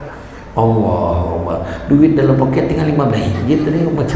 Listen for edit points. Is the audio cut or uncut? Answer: uncut